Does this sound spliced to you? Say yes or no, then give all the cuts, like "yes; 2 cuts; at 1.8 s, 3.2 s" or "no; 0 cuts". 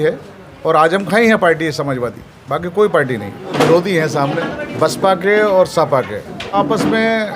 yes; 3 cuts; at 3.5 s, 4.6 s, 6.6 s